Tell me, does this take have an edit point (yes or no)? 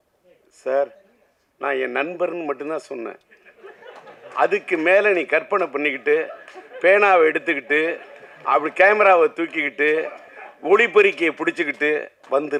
no